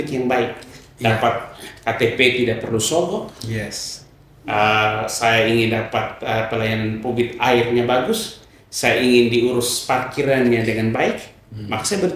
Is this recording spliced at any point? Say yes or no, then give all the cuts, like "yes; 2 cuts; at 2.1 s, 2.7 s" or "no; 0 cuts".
no; 0 cuts